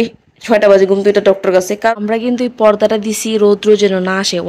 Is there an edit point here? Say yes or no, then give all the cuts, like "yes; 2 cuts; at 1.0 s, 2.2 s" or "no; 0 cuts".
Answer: yes; 1 cut; at 1.7 s